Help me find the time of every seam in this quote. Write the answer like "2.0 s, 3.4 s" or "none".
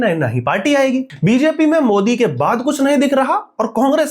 1.1 s